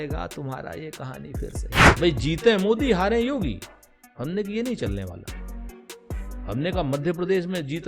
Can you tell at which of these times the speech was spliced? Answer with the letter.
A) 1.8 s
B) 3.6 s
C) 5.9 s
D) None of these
A